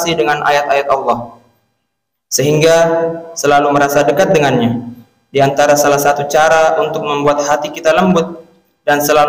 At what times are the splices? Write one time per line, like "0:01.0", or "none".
none